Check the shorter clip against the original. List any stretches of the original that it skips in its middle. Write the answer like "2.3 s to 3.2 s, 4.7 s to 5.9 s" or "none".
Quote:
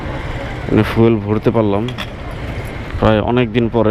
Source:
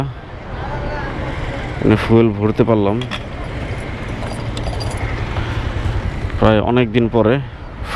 3.9 s to 6.2 s

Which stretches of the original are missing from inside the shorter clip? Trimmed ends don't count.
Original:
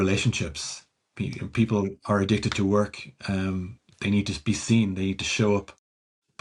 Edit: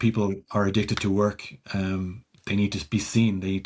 none

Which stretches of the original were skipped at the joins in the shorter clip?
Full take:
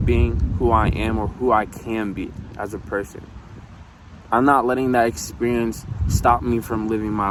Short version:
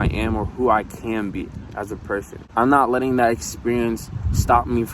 3.2 s to 4.1 s

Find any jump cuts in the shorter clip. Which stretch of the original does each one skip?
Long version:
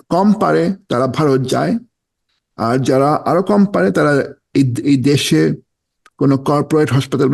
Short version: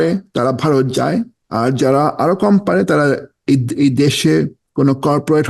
1.9 s to 2.5 s, 5.7 s to 6.0 s

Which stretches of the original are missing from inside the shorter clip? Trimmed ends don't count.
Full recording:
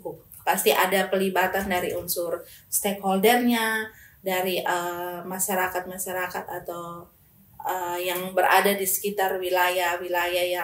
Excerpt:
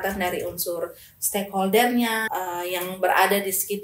3.7 s to 7.6 s

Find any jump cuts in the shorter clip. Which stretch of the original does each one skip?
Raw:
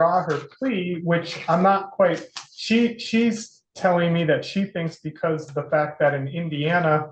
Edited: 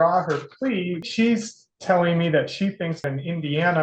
1.0 s to 3.0 s, 5.0 s to 6.2 s

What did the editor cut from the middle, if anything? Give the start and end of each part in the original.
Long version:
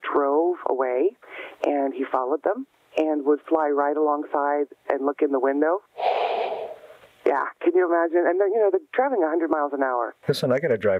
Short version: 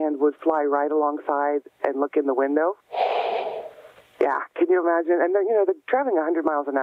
none

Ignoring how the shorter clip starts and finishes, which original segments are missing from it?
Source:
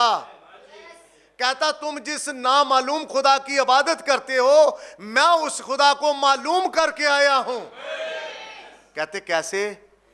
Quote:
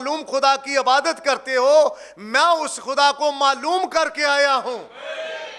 none

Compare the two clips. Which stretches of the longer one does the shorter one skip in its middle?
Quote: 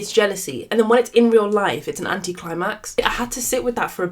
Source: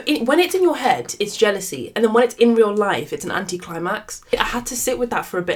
4.1 s to 4.2 s

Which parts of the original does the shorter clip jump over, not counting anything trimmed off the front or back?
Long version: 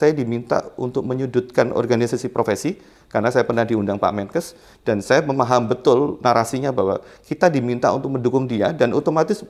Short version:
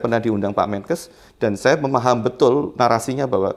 none

